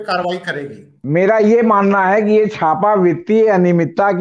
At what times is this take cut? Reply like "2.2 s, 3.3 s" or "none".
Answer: 1.0 s